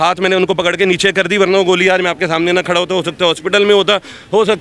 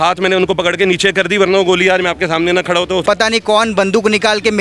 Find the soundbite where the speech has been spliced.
second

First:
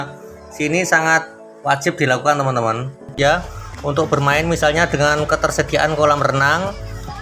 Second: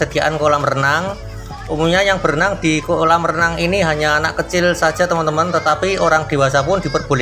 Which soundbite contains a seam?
first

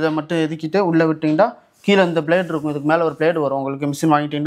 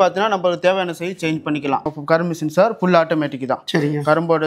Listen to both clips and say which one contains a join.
second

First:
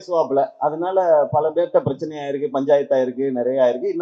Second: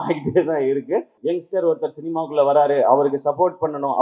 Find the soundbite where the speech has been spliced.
second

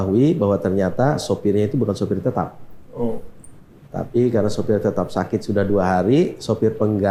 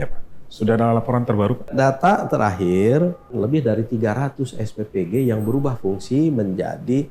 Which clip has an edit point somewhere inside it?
second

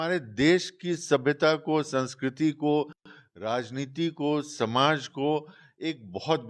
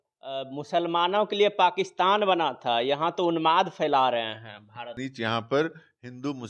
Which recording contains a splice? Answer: second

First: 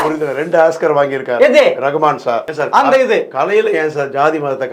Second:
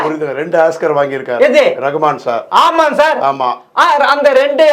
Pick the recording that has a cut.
first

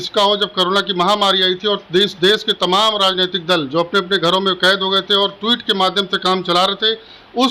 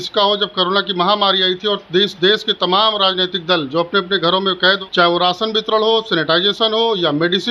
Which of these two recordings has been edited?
second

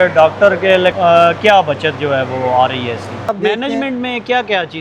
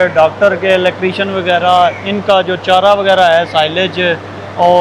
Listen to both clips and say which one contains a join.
first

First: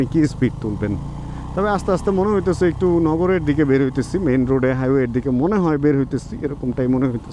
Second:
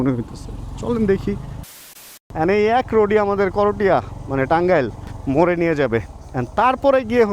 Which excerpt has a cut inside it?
second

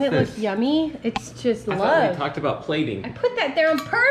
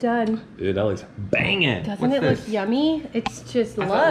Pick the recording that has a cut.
first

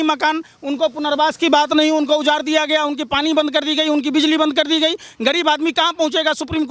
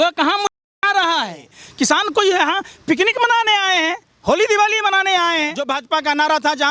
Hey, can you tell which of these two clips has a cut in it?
second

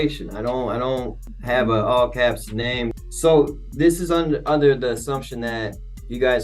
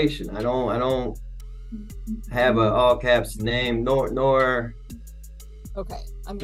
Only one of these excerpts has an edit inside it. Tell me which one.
first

